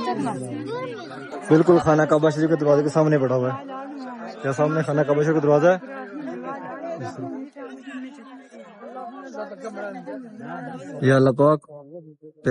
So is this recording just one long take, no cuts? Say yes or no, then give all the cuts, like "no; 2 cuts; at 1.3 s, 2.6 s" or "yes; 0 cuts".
no; 2 cuts; at 1.3 s, 11.0 s